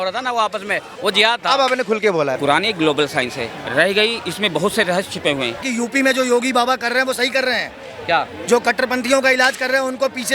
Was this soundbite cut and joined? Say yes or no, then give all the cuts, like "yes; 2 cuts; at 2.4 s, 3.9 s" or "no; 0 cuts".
yes; 3 cuts; at 0.9 s, 2.4 s, 5.7 s